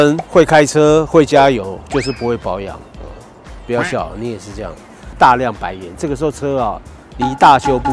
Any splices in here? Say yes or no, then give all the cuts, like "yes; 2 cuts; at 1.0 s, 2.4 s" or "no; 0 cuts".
yes; 1 cut; at 5.1 s